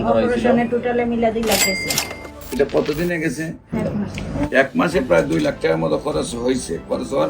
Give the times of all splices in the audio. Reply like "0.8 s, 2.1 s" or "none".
3.7 s